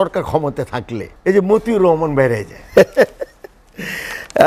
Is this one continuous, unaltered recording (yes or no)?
no